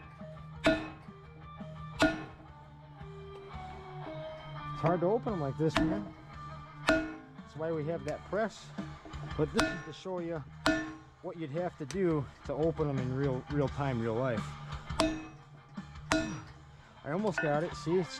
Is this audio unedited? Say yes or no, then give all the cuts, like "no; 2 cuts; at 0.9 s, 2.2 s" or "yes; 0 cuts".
yes; 0 cuts